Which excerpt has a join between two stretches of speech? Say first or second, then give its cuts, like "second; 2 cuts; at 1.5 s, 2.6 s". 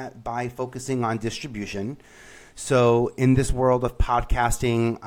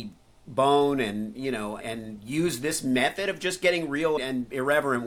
second; 2 cuts; at 1.8 s, 4.2 s